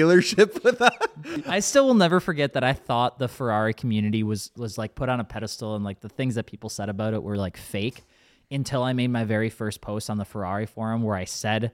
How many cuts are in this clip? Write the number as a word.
one